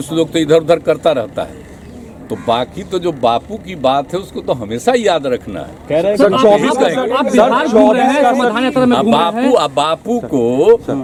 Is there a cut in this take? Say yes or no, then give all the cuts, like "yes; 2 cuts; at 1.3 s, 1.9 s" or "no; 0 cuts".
no; 0 cuts